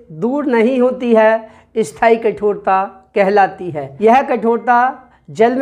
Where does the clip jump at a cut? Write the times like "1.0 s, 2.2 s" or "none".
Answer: none

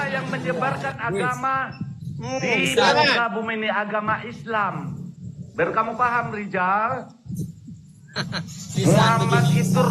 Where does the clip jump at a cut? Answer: none

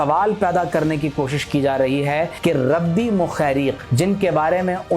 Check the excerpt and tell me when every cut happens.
2.3 s, 3.8 s

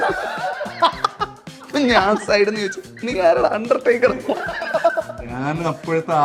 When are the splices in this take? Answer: none

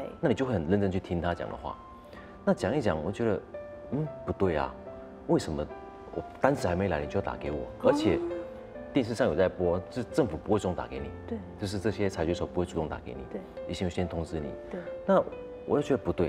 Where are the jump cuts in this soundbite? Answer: none

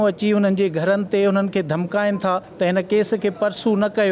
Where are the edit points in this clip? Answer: 2.5 s

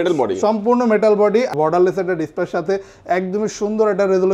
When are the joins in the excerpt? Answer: 1.5 s

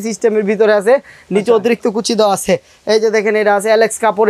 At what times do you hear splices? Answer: none

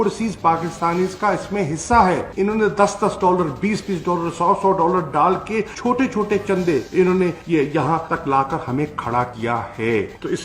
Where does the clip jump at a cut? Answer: 5.7 s

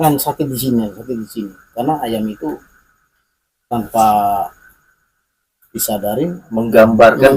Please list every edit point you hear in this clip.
6.4 s

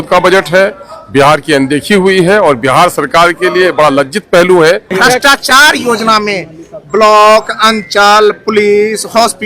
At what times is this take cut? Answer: 4.9 s

